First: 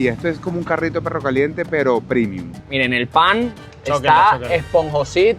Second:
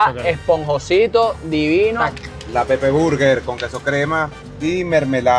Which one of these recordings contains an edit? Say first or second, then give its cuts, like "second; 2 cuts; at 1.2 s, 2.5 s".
first; 1 cut; at 2.6 s